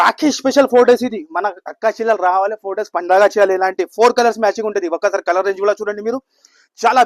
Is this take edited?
no; 0 cuts

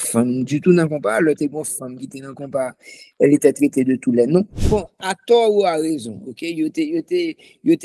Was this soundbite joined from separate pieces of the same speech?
yes; 1 cut; at 4.6 s

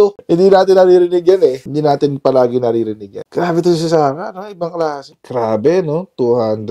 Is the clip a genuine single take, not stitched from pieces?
no; 1 cut; at 5.1 s

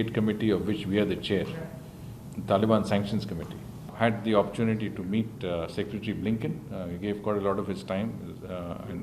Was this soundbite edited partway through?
yes; 1 cut; at 3.9 s

